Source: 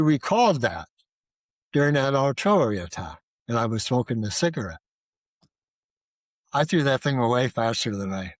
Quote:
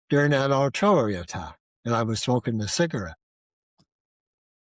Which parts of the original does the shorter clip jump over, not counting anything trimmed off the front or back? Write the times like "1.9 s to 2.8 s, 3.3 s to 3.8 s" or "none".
none